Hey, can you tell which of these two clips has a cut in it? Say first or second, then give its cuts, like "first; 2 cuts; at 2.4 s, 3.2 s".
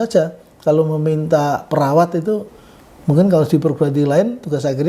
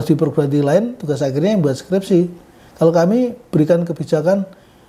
first; 1 cut; at 2.5 s